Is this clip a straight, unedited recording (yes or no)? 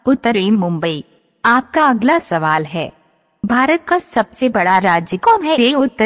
no